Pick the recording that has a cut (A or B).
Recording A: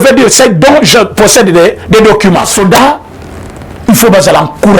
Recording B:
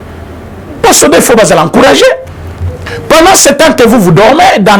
A